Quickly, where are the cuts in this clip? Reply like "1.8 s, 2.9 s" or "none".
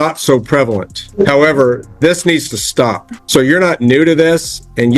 1.0 s, 3.1 s